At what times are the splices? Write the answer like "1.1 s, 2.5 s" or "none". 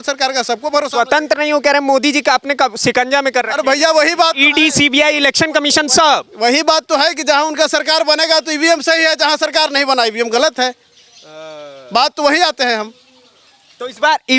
none

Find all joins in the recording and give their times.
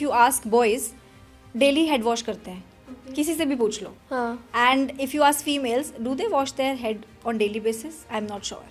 none

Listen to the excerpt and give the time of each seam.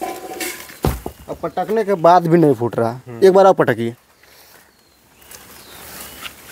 none

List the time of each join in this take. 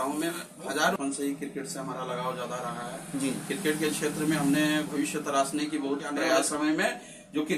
1.0 s, 6.5 s

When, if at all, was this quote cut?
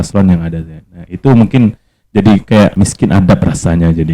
2.7 s

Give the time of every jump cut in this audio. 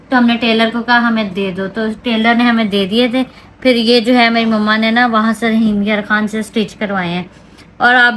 none

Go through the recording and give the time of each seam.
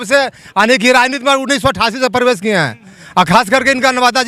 none

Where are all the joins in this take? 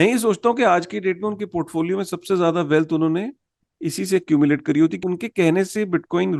5.0 s

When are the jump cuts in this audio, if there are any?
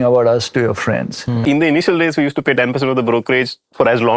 1.4 s

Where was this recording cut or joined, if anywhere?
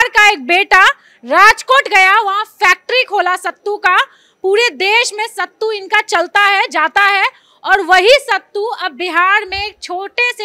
none

